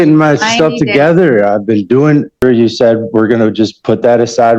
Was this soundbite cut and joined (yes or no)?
yes